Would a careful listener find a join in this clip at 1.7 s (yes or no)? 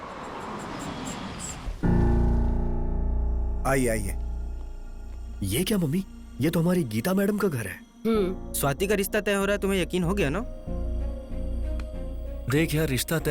yes